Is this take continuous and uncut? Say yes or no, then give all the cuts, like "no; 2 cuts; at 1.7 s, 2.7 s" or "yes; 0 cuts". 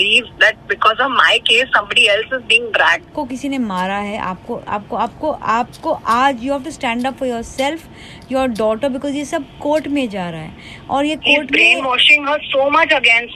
no; 1 cut; at 3.1 s